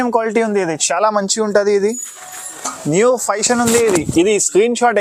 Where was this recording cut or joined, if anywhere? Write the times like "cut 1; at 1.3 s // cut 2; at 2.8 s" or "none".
none